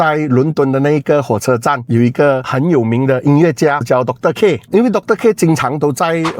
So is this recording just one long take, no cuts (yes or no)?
yes